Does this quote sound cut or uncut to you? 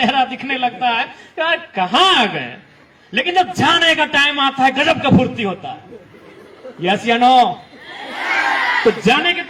uncut